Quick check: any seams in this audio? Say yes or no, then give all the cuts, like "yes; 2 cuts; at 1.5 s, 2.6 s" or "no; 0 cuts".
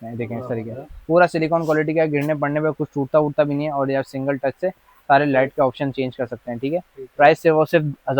no; 0 cuts